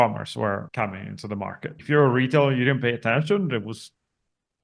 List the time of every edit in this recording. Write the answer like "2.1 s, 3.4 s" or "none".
1.3 s